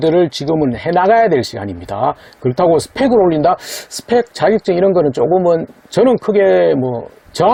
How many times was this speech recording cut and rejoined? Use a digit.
0